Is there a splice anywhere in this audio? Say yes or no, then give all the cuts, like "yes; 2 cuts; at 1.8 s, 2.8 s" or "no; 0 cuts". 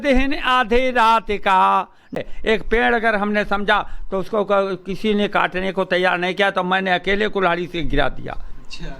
yes; 1 cut; at 2.2 s